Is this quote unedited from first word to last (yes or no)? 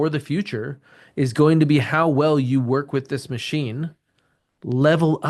yes